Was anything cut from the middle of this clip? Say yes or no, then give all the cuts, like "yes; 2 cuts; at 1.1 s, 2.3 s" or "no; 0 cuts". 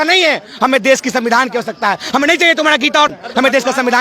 yes; 1 cut; at 3.1 s